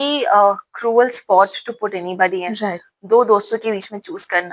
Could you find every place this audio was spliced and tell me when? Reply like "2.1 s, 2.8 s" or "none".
none